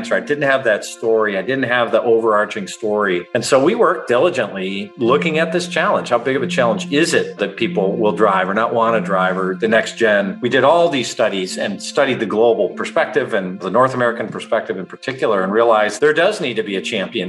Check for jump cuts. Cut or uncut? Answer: cut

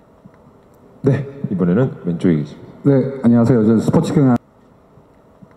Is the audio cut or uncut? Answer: cut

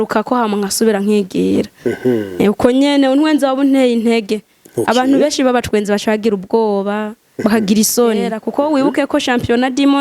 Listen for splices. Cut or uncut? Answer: cut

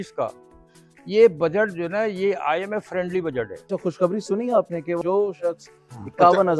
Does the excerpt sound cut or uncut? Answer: cut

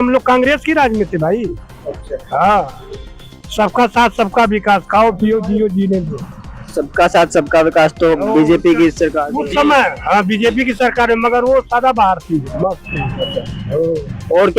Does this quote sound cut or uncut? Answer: uncut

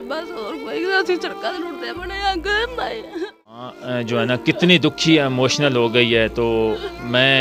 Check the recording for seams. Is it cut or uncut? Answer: cut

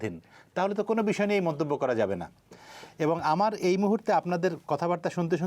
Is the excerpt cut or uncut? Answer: uncut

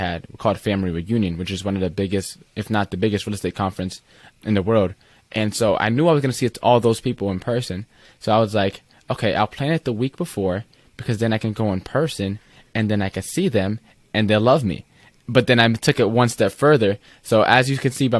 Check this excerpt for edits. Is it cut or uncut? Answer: uncut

